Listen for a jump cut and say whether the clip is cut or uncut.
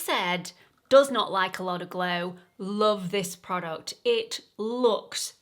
uncut